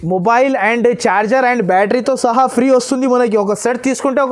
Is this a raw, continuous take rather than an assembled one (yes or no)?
yes